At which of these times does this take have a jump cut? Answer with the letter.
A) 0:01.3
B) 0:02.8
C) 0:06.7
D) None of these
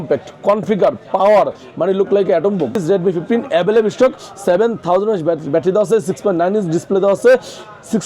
B